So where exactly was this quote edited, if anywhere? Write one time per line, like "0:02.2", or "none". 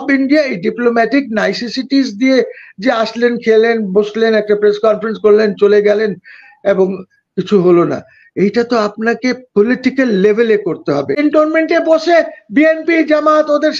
0:11.2